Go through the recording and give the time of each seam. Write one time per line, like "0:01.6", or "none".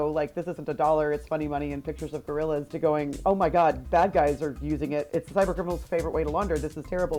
none